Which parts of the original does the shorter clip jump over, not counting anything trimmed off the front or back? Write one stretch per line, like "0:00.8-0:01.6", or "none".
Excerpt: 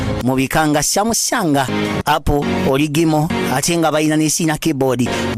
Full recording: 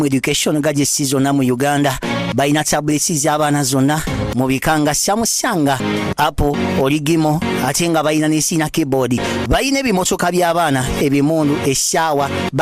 none